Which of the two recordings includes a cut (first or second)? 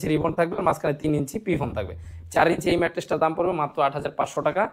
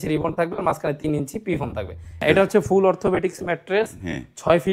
second